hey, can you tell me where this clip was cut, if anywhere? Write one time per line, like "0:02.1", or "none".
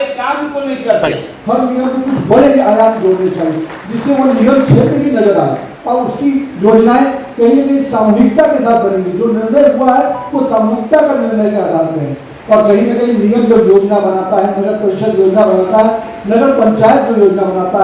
0:01.3